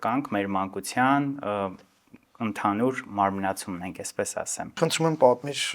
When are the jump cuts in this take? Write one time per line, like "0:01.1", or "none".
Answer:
0:04.8